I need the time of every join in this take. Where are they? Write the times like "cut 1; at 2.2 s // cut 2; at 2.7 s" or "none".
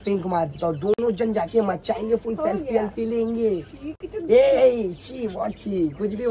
none